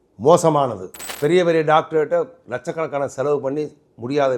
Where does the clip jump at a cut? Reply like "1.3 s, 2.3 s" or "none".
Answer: 1.1 s